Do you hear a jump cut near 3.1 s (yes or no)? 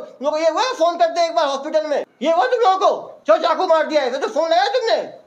yes